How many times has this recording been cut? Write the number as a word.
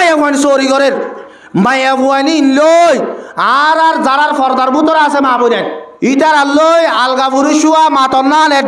one